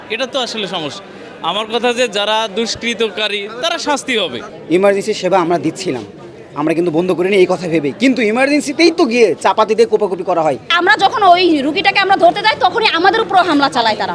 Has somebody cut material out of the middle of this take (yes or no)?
yes